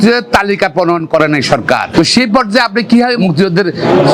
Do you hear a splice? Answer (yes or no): yes